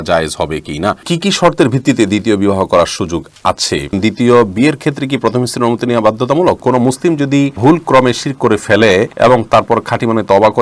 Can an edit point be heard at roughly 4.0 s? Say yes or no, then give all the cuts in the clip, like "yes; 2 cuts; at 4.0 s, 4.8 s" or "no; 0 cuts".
yes; 5 cuts; at 1.1 s, 4.0 s, 6.6 s, 7.5 s, 9.1 s